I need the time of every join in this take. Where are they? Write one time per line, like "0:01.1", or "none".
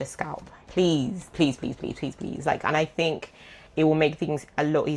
none